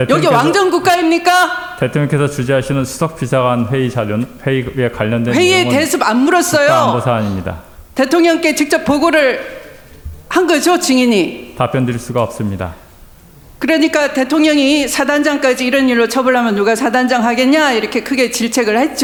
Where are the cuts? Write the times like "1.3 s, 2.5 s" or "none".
none